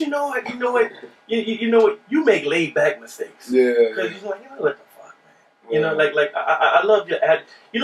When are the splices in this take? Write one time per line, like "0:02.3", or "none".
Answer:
none